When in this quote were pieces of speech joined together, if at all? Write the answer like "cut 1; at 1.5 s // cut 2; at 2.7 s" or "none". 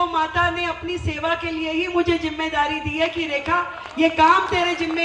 none